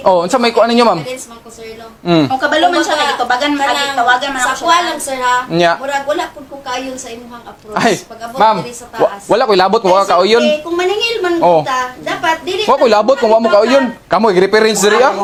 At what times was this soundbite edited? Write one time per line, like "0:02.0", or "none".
none